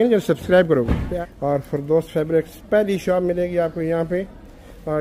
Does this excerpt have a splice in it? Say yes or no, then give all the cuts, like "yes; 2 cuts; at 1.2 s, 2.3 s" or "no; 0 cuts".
yes; 1 cut; at 1.1 s